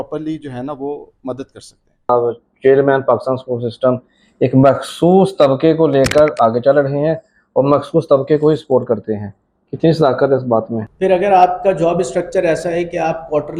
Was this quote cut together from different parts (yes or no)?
yes